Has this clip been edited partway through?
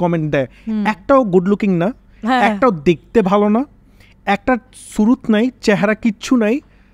no; 0 cuts

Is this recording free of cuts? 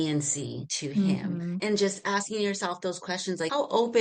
yes; 0 cuts

